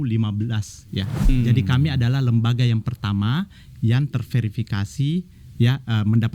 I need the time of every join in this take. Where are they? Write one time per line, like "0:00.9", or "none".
0:01.3